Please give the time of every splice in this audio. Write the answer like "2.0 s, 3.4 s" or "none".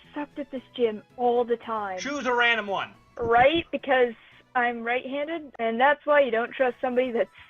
3.0 s, 5.5 s

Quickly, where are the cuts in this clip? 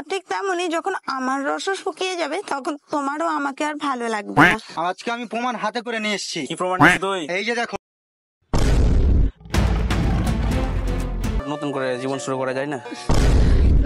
4.7 s, 11.4 s

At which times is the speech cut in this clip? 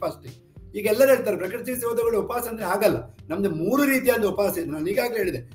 none

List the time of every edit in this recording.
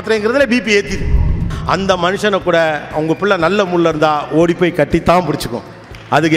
1.5 s

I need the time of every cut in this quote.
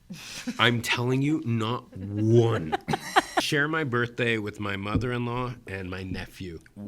3.5 s

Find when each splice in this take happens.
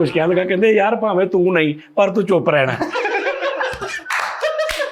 none

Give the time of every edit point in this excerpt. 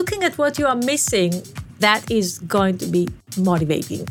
1.8 s, 3.2 s

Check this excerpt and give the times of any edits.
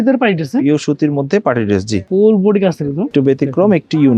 2.0 s, 3.1 s

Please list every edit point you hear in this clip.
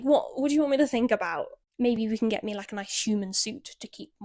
1.6 s

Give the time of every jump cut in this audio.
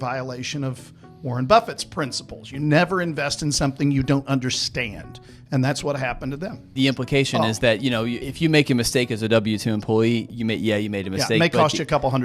6.6 s, 8.2 s, 10.3 s

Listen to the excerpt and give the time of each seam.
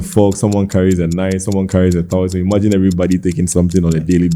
none

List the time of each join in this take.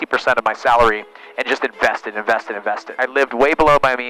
3.0 s

